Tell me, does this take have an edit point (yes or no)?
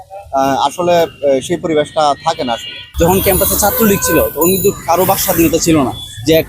yes